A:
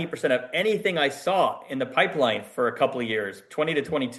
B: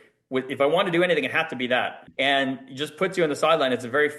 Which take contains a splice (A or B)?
B